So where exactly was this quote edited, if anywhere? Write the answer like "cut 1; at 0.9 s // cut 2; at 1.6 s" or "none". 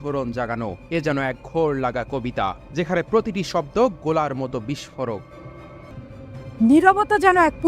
cut 1; at 5.9 s